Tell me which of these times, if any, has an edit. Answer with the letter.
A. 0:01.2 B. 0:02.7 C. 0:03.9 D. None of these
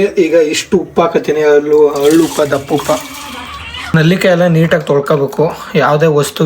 C